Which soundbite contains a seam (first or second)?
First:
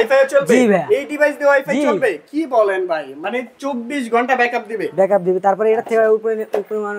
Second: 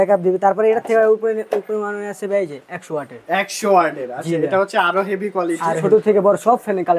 second